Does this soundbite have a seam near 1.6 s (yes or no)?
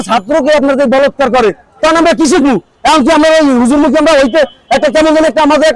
no